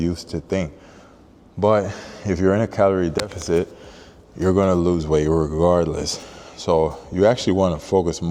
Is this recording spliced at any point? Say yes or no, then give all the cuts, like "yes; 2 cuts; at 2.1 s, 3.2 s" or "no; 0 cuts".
no; 0 cuts